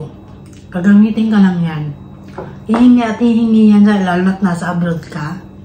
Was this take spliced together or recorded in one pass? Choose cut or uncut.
uncut